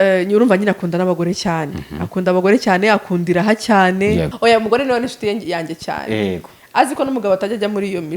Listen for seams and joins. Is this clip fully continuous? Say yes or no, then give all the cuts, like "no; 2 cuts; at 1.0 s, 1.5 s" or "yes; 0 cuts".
no; 1 cut; at 4.3 s